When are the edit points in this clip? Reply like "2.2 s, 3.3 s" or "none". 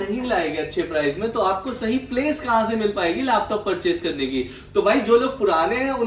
none